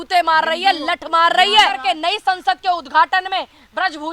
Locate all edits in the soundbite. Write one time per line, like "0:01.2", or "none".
0:01.8